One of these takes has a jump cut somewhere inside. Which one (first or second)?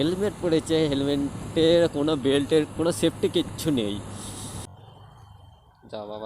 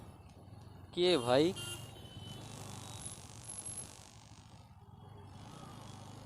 first